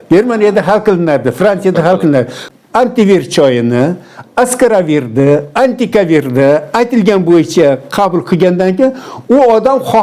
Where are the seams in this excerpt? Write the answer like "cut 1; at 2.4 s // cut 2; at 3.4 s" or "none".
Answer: cut 1; at 2.5 s